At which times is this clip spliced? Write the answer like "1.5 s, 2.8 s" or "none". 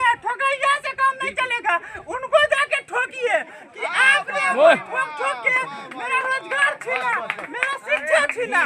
none